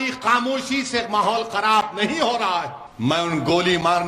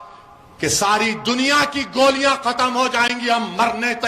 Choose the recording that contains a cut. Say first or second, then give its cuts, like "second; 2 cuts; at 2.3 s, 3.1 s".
first; 1 cut; at 2.8 s